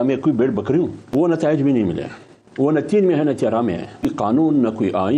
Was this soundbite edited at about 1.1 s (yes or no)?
yes